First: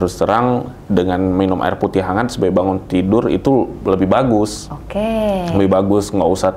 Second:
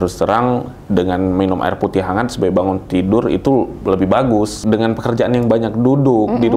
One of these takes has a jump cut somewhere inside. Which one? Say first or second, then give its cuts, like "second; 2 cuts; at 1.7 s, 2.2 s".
second; 1 cut; at 4.6 s